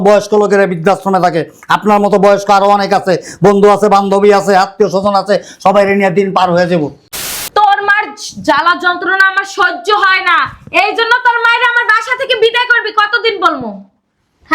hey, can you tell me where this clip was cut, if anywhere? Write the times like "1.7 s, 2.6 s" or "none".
7.1 s